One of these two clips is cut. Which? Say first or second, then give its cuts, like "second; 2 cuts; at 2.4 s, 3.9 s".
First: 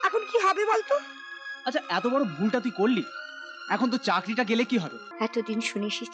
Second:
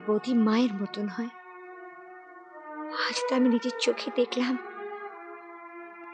first; 1 cut; at 5.0 s